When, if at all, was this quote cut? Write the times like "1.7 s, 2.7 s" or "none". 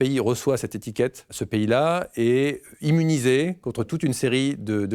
1.4 s